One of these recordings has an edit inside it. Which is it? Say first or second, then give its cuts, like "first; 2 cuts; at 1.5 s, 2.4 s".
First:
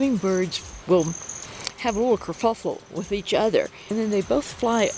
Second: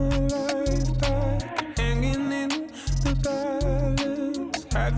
first; 1 cut; at 3.9 s